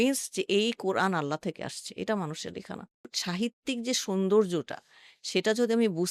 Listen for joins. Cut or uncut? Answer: cut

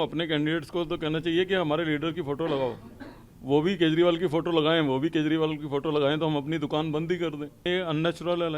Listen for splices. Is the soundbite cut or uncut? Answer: cut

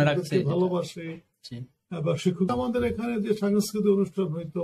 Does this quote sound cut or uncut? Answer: cut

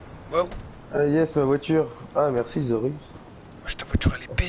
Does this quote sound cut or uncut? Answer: uncut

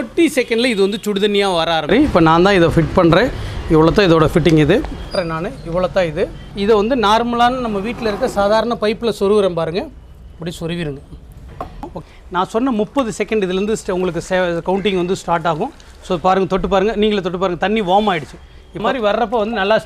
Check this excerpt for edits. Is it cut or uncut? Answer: cut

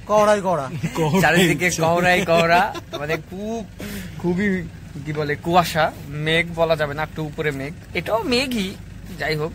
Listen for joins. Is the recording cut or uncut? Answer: uncut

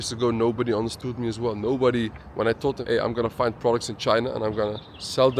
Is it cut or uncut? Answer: cut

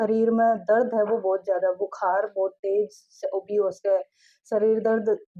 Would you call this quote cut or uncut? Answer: uncut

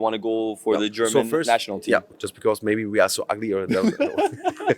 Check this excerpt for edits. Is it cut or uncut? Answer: cut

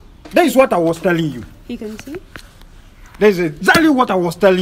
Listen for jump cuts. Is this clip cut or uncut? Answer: uncut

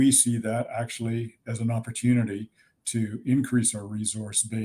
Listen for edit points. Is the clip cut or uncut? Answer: uncut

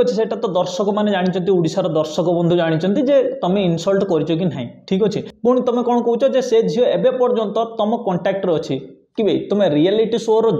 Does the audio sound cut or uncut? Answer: uncut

